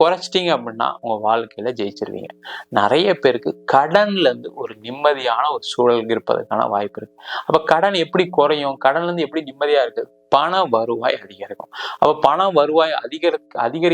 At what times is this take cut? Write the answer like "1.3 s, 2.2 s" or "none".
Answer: none